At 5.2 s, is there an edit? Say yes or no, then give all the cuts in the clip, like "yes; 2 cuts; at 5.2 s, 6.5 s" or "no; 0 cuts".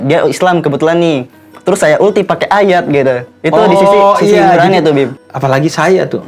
yes; 1 cut; at 5.2 s